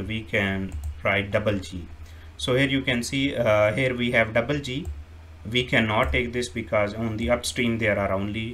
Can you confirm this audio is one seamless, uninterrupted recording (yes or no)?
yes